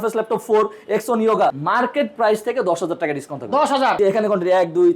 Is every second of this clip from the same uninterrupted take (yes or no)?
no